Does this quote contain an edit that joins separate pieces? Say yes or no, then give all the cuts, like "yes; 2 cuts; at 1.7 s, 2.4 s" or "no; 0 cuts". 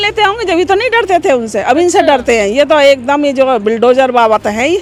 no; 0 cuts